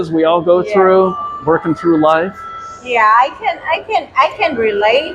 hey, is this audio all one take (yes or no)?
yes